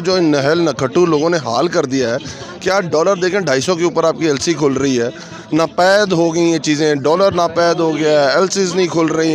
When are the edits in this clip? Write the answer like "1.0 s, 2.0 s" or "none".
none